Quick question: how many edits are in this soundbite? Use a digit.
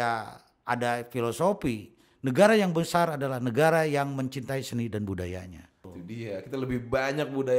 1